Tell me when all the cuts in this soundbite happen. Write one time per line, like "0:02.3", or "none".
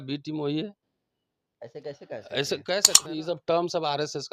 0:03.0